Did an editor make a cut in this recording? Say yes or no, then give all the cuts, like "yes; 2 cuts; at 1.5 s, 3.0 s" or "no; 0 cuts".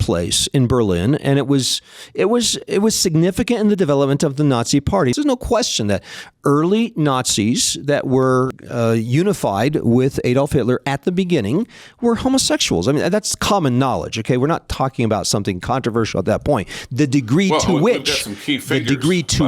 yes; 2 cuts; at 5.1 s, 8.6 s